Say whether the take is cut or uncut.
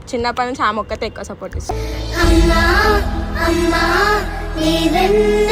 uncut